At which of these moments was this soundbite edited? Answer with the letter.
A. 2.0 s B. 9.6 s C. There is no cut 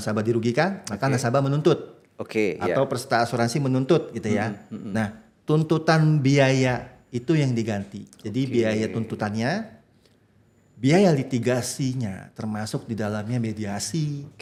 C